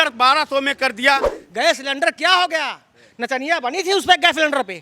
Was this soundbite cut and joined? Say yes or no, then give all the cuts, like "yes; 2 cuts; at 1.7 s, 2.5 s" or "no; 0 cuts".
yes; 1 cut; at 1.4 s